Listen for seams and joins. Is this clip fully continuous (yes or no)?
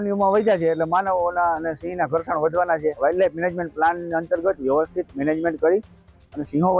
no